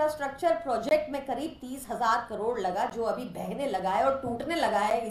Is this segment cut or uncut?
uncut